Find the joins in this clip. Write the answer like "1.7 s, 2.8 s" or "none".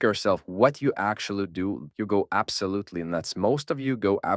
1.9 s